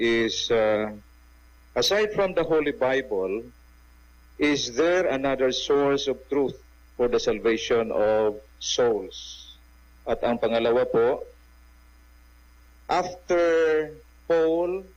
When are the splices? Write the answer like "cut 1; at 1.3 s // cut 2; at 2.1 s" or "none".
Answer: none